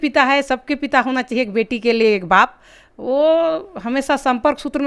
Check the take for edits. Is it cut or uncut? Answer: uncut